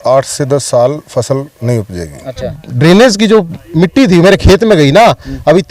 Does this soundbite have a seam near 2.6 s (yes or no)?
yes